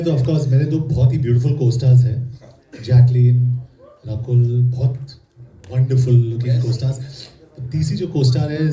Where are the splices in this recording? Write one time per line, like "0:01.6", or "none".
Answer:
none